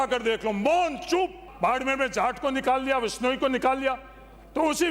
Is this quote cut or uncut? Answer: cut